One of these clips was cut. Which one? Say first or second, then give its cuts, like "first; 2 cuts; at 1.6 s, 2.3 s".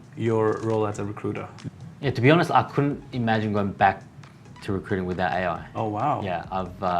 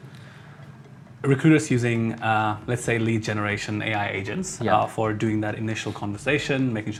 first; 1 cut; at 1.5 s